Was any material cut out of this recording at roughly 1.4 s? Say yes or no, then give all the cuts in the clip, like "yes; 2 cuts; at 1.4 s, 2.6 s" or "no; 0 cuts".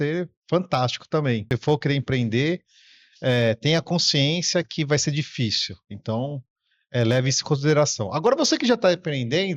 yes; 1 cut; at 1.4 s